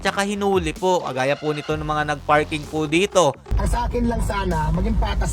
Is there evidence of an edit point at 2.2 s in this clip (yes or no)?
no